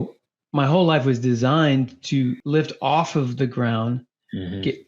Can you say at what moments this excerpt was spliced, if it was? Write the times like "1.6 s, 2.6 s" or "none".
2.4 s